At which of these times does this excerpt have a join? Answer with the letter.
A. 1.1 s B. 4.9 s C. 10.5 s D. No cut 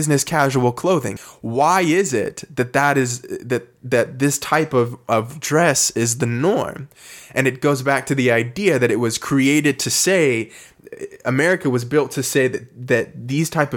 A